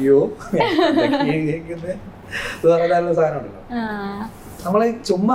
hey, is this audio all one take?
yes; 0 cuts

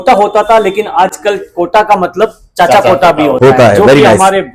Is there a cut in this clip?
no; 0 cuts

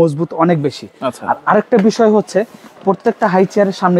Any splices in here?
no; 0 cuts

